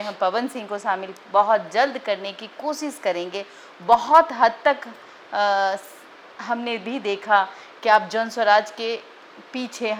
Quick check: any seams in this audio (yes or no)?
no